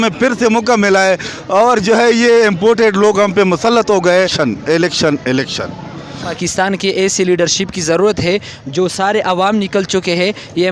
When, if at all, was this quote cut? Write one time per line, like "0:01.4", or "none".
0:04.3
0:06.1